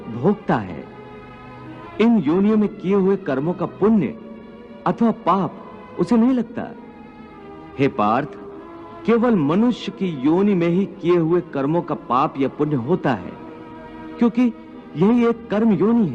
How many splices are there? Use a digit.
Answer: 1